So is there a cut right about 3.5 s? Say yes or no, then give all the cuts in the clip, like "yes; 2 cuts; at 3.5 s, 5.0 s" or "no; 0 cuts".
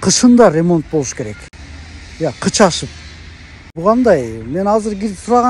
yes; 1 cut; at 3.5 s